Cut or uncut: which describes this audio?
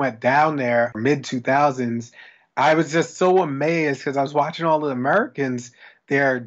cut